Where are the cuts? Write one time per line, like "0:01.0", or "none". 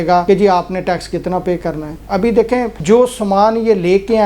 none